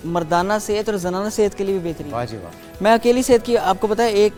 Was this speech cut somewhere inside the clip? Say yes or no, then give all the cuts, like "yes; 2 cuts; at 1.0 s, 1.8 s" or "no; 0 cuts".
no; 0 cuts